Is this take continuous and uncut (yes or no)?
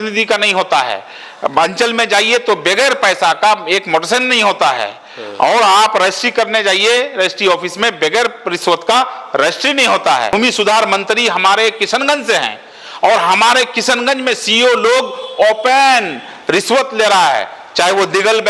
no